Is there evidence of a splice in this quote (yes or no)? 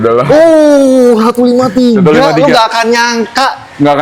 no